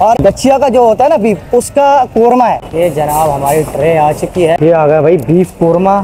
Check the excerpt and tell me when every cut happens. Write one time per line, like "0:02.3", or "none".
0:02.7
0:04.6